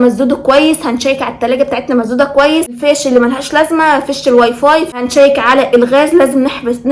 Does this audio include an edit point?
yes; 2 cuts; at 2.8 s, 5.0 s

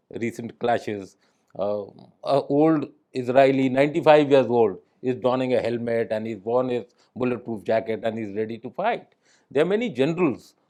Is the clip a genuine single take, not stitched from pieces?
yes; 0 cuts

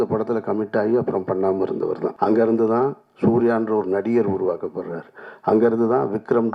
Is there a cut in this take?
yes; 1 cut; at 2.1 s

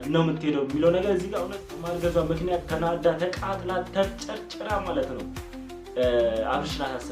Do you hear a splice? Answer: yes; 1 cut; at 1.8 s

